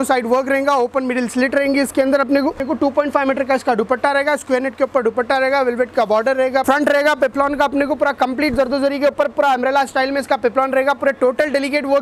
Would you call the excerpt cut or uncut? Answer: cut